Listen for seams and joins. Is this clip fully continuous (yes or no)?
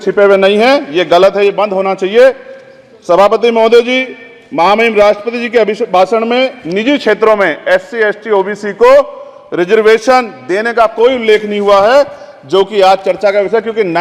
yes